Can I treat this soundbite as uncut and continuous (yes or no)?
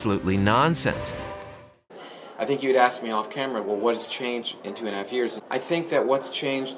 no